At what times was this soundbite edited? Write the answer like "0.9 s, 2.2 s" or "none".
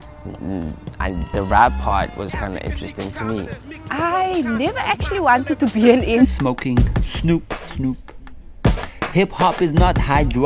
none